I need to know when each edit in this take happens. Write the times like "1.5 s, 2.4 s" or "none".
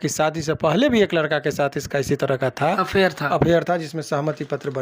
none